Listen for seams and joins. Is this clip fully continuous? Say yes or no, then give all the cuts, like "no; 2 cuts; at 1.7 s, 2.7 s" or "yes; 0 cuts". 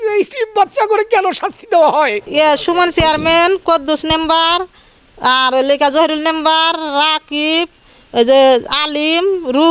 no; 1 cut; at 2.2 s